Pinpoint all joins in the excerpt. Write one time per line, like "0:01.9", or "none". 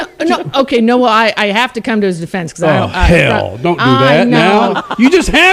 none